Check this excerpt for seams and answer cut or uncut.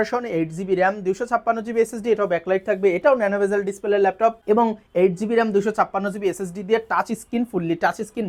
uncut